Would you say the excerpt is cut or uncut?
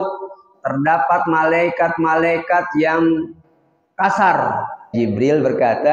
cut